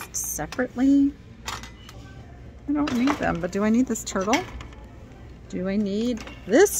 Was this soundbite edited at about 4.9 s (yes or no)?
no